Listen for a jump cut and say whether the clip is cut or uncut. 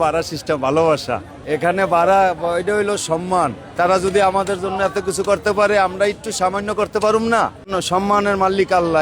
cut